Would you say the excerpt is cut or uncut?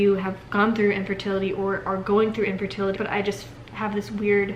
cut